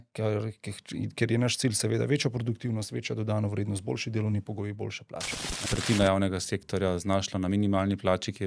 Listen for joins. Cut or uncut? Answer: cut